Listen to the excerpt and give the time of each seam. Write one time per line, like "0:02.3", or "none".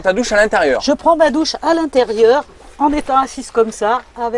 none